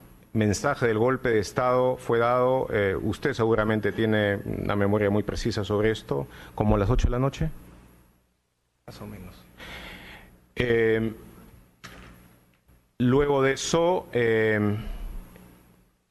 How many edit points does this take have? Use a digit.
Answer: 1